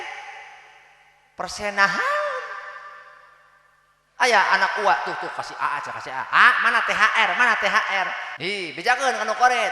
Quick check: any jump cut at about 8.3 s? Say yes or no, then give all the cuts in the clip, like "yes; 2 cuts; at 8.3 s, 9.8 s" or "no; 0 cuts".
yes; 1 cut; at 8.3 s